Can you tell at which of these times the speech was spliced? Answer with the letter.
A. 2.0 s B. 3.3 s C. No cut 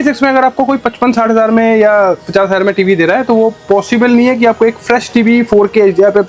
C